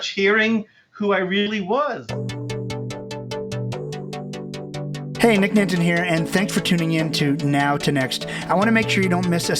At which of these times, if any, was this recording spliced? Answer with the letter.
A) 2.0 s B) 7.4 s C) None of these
A